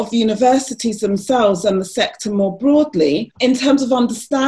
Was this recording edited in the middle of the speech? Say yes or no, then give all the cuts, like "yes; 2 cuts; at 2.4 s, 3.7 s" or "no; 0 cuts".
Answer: yes; 1 cut; at 3.3 s